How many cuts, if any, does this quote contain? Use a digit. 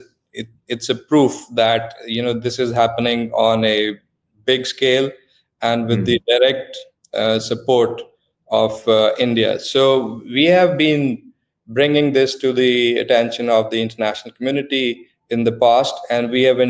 0